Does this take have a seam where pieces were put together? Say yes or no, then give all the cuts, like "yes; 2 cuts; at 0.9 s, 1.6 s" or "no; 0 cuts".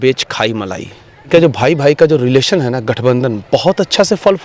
yes; 1 cut; at 1.3 s